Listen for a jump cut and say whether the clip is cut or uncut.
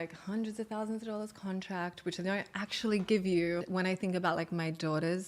cut